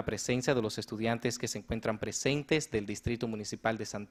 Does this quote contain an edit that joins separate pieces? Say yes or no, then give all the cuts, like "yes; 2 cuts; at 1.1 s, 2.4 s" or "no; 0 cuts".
no; 0 cuts